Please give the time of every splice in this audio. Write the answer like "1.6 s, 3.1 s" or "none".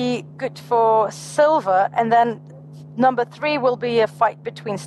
none